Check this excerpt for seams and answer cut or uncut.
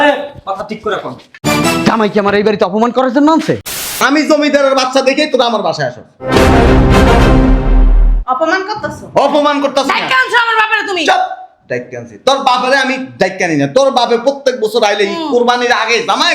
cut